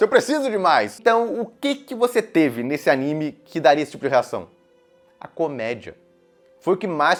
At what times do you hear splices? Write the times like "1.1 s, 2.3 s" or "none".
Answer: none